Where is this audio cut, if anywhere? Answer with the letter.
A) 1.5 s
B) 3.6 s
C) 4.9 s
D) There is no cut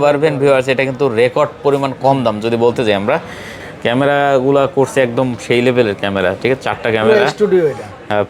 B